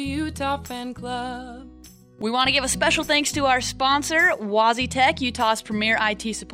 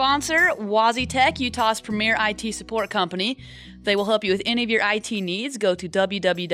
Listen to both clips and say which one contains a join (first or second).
first